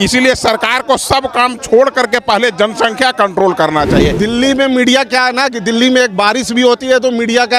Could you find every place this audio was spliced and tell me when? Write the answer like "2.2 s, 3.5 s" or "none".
4.2 s

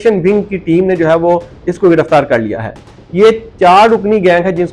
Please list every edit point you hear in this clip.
none

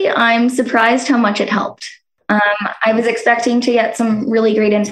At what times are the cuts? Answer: 2.4 s

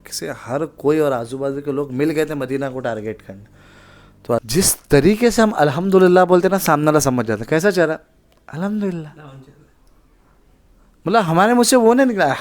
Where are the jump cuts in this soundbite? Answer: 4.5 s

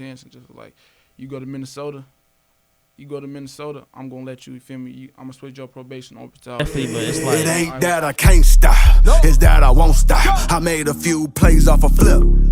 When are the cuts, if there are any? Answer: 6.6 s

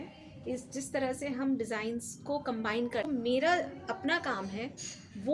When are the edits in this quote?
3.1 s

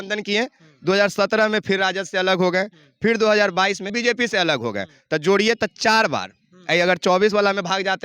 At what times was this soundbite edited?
3.9 s

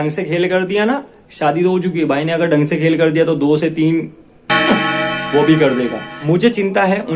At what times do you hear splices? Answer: 6.1 s

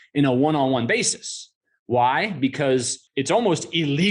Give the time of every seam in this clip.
3.0 s

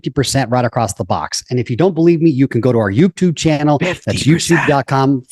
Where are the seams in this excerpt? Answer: none

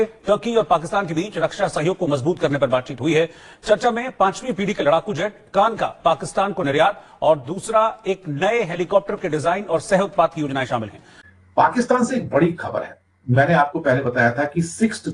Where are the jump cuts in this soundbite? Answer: 11.2 s

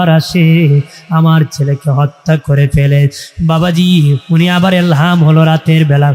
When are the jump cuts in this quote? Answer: none

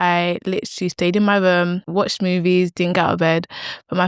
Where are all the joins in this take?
1.8 s

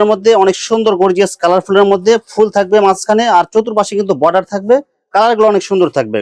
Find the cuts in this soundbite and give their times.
none

